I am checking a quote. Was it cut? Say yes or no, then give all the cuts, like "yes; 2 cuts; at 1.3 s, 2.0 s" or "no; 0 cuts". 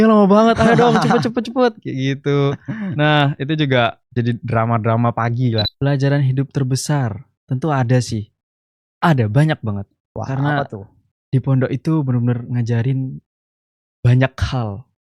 yes; 1 cut; at 5.7 s